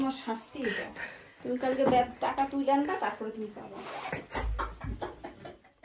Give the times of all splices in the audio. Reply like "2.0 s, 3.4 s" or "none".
none